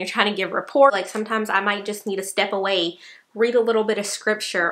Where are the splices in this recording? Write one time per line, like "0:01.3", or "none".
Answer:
0:00.9